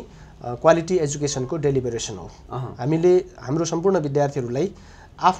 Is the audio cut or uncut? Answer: uncut